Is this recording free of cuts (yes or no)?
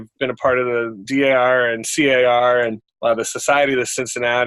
no